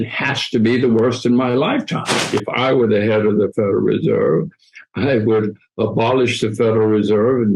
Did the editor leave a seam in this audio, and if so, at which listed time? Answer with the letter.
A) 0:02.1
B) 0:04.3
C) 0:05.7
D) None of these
A